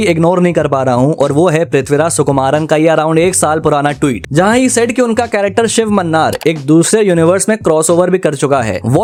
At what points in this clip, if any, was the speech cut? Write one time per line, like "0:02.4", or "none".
none